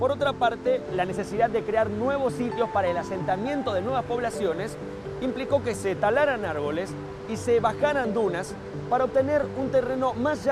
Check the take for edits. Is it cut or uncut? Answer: cut